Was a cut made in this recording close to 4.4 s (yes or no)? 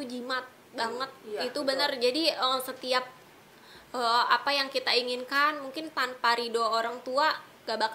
no